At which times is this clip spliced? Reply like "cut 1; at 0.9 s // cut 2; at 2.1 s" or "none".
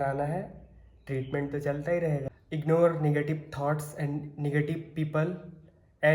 cut 1; at 2.3 s

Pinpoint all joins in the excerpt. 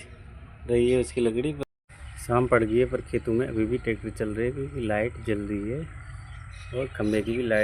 cut 1; at 1.6 s

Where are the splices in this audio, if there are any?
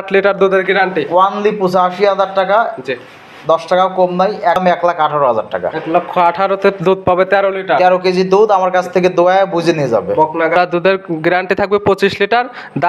cut 1; at 4.6 s // cut 2; at 10.6 s

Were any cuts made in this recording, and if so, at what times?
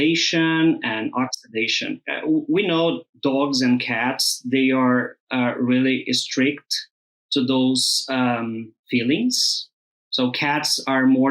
cut 1; at 2.1 s // cut 2; at 3.1 s // cut 3; at 8.7 s

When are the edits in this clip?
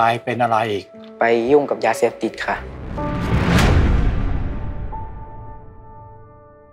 none

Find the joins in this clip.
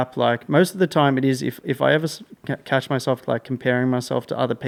none

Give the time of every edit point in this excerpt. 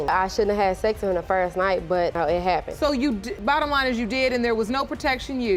none

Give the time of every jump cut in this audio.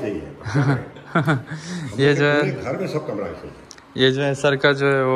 none

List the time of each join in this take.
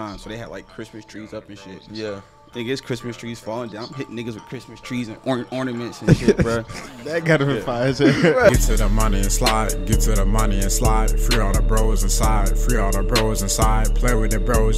cut 1; at 8.5 s

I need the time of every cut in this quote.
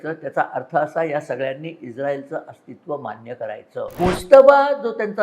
cut 1; at 3.9 s

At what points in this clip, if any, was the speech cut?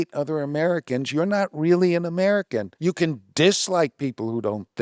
cut 1; at 2.7 s

